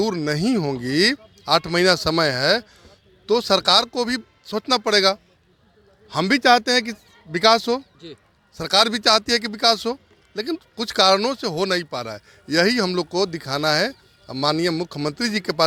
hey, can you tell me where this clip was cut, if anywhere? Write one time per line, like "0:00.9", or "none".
none